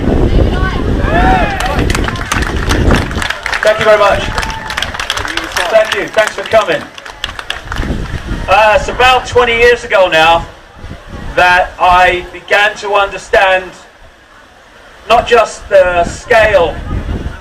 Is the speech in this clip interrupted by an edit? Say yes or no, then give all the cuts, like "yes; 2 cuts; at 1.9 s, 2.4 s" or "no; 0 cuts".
yes; 1 cut; at 3.2 s